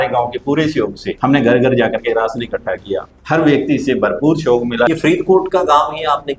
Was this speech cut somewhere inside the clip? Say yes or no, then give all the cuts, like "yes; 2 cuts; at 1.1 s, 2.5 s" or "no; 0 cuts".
yes; 3 cuts; at 1.0 s, 3.1 s, 4.9 s